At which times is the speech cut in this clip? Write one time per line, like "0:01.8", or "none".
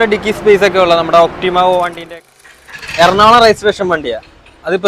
0:02.2